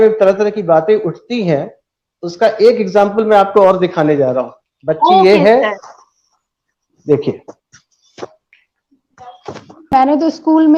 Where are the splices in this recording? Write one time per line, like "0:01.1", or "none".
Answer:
none